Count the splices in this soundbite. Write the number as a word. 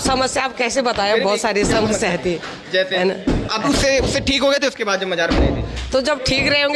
one